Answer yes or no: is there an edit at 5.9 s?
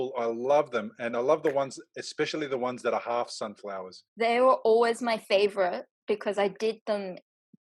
no